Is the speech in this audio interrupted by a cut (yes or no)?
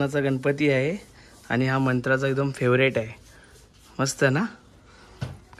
no